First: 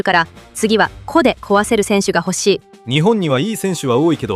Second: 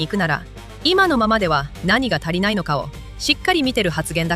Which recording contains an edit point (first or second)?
first